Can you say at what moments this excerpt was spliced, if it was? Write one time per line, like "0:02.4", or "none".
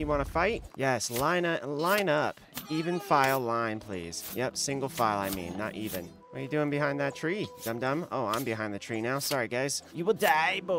none